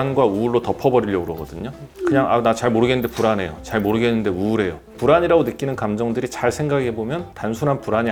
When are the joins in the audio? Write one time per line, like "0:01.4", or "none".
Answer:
none

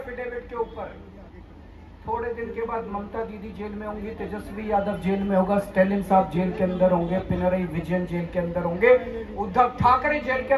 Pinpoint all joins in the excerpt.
none

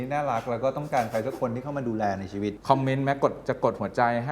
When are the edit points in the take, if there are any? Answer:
none

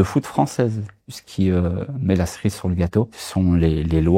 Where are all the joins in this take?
0:01.2
0:03.2

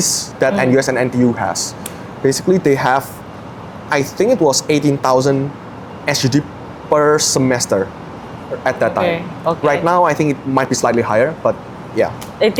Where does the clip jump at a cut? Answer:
none

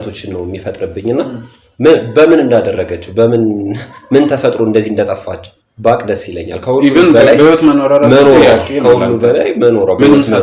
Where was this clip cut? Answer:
none

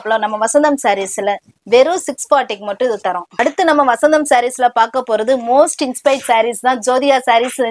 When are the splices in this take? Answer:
0:03.3

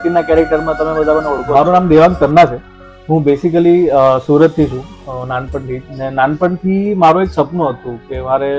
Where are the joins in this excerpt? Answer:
0:01.5

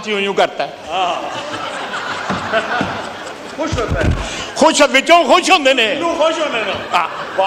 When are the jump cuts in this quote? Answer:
none

